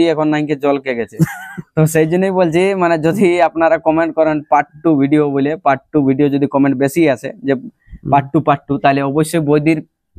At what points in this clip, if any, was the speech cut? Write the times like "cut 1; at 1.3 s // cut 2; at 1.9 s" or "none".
none